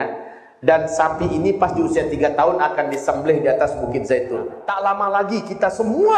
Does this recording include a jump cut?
yes; 1 cut; at 4.6 s

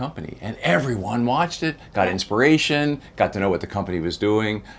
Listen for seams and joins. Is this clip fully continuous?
yes; 0 cuts

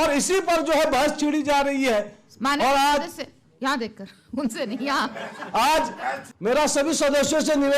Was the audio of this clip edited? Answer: yes; 1 cut; at 6.3 s

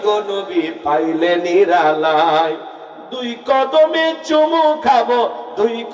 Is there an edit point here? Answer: no; 0 cuts

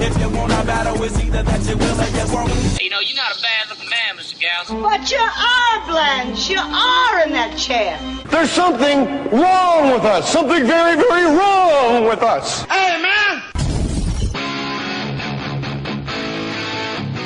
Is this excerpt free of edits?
yes; 0 cuts

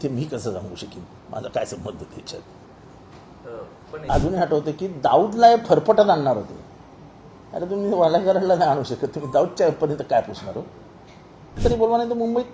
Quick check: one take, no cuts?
no; 2 cuts; at 4.1 s, 11.6 s

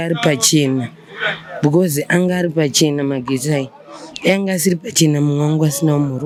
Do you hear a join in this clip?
no; 0 cuts

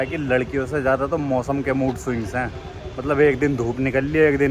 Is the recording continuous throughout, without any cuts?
yes; 0 cuts

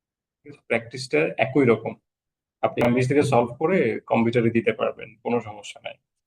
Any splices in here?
yes; 1 cut; at 2.8 s

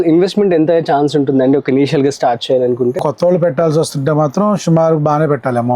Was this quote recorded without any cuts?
no; 1 cut; at 3.0 s

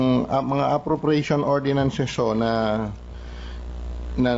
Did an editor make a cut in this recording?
no; 0 cuts

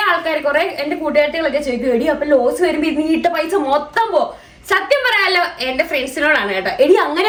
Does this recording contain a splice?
no; 0 cuts

